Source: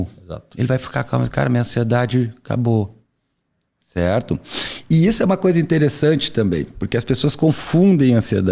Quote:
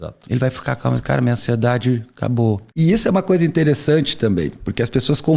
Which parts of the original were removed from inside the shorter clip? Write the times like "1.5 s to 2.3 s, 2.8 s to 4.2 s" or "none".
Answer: 3.0 s to 4.8 s